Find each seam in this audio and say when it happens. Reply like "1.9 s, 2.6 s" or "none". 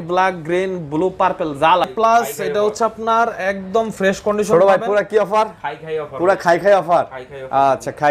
1.9 s